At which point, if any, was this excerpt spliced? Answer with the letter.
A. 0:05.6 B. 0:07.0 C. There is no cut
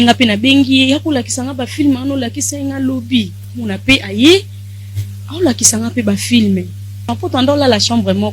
B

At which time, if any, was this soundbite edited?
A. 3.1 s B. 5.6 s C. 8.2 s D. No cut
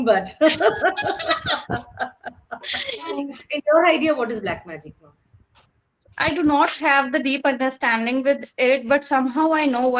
A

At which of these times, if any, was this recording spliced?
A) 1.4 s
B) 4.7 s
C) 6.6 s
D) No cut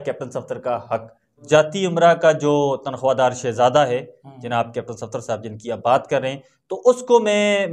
A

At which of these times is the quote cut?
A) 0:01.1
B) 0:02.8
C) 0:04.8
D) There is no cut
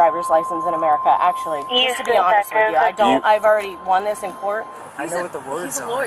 C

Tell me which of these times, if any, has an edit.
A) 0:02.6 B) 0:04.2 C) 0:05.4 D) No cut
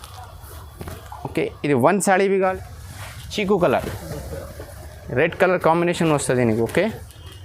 A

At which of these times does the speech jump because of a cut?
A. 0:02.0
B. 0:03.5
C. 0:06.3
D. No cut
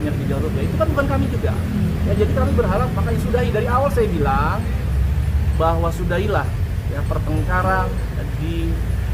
D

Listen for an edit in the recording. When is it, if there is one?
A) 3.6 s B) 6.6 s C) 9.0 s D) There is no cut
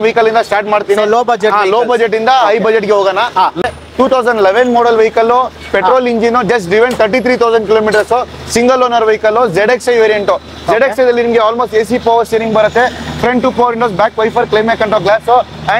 A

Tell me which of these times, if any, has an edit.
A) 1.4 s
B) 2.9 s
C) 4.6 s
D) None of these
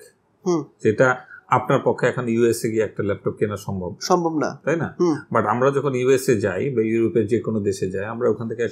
D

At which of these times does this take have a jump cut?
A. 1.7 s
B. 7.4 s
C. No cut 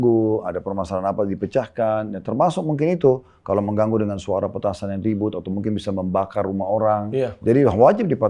B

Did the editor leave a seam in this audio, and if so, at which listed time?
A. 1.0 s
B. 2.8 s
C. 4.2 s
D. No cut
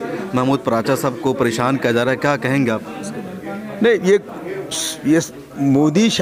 D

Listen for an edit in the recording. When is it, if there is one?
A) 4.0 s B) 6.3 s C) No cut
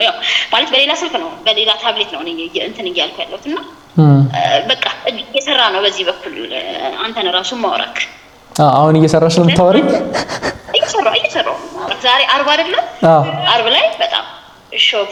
C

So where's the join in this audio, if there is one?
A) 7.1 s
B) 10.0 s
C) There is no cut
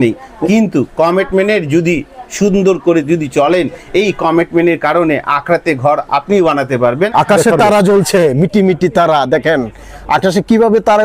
A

